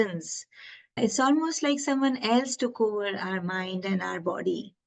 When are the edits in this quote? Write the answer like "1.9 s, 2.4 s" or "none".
0.9 s